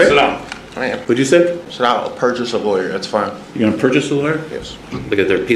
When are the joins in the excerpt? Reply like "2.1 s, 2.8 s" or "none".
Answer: 1.0 s, 1.7 s